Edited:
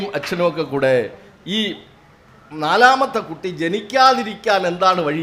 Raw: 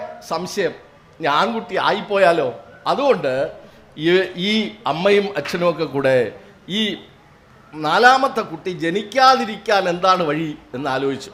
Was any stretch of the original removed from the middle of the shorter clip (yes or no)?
no